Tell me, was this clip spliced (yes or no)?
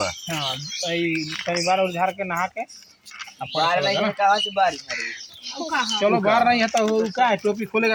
no